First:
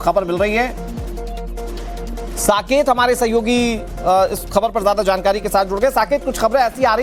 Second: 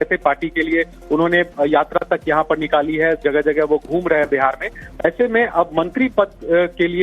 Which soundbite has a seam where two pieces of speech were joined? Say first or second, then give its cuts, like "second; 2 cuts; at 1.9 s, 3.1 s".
second; 1 cut; at 1.2 s